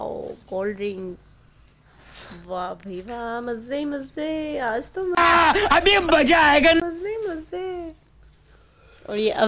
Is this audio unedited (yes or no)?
yes